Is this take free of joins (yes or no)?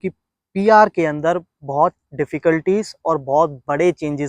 yes